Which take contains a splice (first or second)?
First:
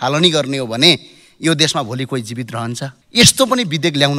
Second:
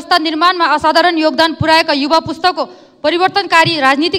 first